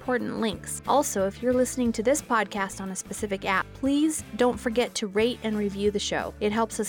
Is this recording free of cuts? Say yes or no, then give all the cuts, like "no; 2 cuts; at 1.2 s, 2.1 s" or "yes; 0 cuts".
yes; 0 cuts